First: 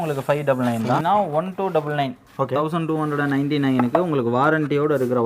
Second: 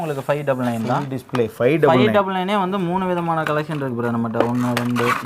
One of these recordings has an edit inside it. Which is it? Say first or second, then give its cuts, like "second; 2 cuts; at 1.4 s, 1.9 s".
first; 1 cut; at 1.0 s